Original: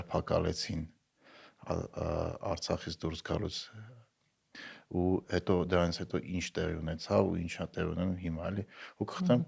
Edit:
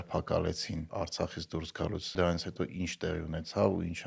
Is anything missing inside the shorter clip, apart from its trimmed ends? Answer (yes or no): yes